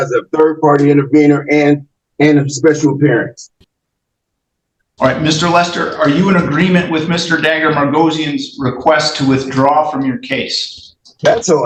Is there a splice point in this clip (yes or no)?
no